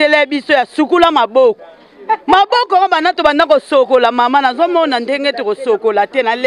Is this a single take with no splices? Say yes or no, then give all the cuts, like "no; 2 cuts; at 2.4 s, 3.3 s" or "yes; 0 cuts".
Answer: yes; 0 cuts